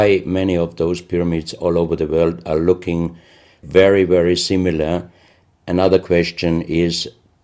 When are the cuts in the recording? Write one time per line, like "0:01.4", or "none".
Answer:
none